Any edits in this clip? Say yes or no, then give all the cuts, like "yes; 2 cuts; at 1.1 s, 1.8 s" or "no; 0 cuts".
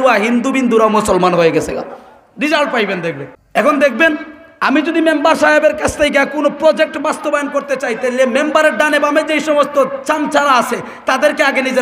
yes; 1 cut; at 3.3 s